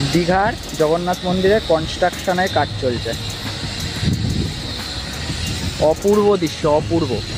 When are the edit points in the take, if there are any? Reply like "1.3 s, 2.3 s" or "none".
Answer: none